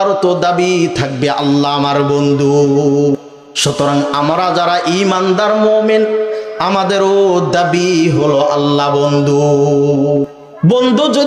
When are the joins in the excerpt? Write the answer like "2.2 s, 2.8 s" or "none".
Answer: 3.2 s, 10.3 s

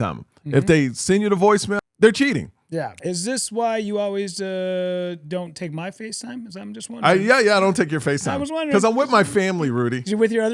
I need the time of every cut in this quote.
1.7 s, 3.0 s

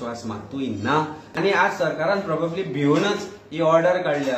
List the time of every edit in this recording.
1.3 s

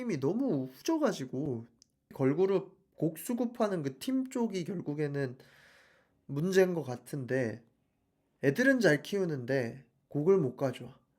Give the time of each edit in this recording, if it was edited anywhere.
2.1 s

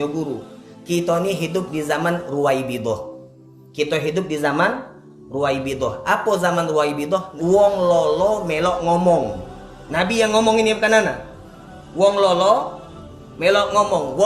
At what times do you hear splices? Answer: 7.3 s

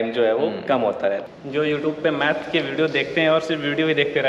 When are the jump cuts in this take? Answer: 1.3 s

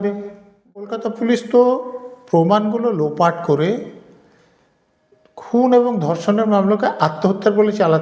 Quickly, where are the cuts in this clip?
1.0 s

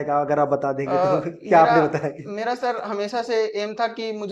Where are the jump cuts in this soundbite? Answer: none

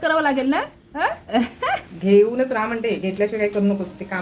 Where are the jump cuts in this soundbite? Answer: 1.9 s

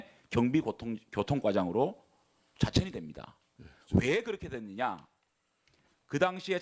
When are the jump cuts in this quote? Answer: none

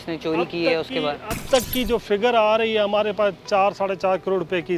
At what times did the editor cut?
none

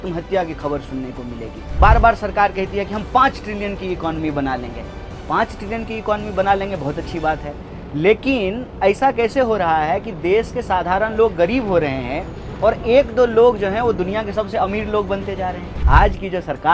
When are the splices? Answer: 1.6 s, 15.7 s

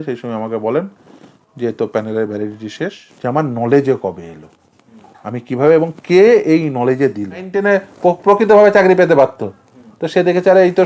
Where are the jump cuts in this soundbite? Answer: 3.1 s, 7.5 s

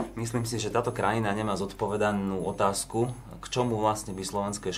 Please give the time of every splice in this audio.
none

